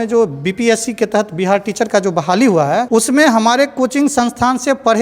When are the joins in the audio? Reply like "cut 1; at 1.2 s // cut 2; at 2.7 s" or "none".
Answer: cut 1; at 2.9 s